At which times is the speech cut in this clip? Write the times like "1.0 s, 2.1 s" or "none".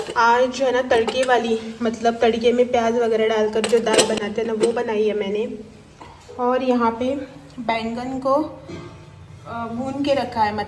none